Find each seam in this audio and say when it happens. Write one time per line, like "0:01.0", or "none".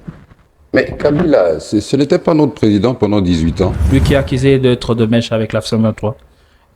0:03.8

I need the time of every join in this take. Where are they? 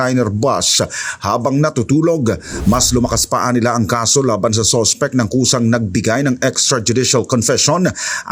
0:02.5

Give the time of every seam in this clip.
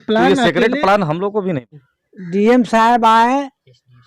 0:01.6

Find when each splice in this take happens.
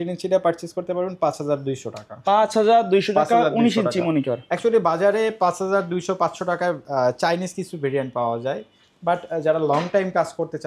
none

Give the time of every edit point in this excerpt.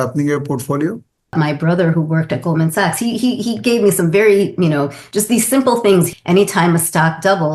0:01.3
0:06.1

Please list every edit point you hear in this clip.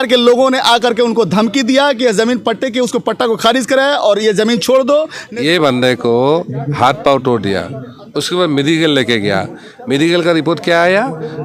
0:05.2

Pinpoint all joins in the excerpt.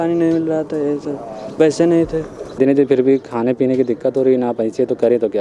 0:02.6

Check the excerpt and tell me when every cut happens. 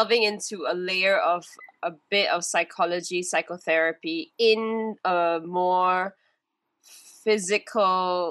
none

